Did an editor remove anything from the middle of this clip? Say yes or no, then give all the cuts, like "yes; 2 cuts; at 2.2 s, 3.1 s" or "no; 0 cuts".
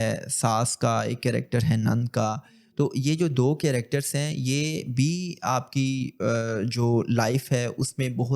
no; 0 cuts